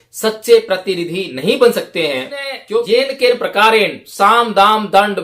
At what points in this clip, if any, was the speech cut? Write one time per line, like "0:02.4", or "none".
0:02.6